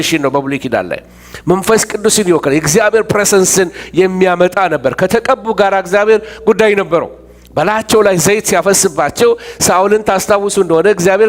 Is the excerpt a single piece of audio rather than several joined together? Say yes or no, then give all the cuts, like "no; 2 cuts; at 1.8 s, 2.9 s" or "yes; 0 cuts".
yes; 0 cuts